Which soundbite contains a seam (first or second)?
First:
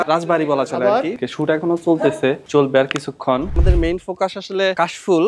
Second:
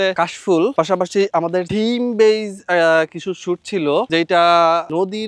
first